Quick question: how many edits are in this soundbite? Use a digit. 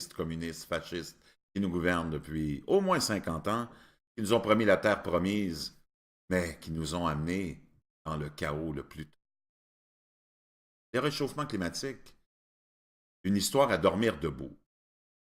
1